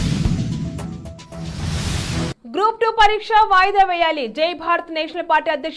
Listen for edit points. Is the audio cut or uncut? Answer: cut